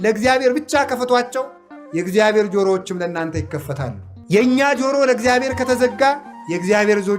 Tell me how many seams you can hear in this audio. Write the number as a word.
one